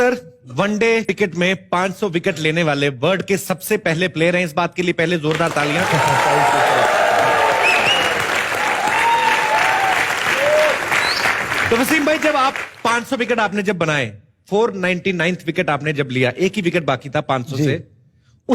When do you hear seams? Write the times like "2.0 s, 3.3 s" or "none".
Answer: 1.1 s